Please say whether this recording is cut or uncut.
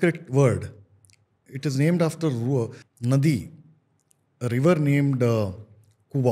cut